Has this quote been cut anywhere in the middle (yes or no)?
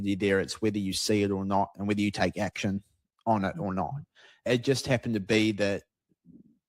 yes